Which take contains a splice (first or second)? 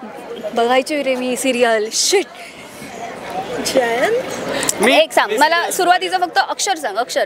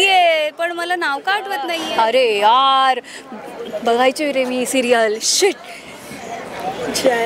second